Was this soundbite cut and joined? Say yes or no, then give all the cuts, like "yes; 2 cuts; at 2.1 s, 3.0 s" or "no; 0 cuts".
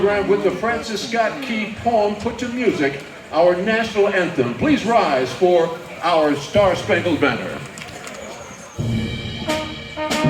no; 0 cuts